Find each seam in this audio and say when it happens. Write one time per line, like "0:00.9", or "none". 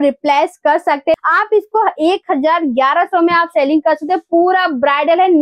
0:01.2